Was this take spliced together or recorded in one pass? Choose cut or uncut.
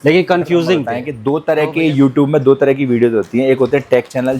cut